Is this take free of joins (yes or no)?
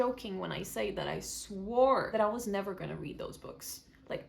no